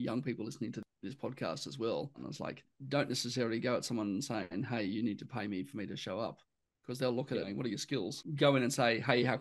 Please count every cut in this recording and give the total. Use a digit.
3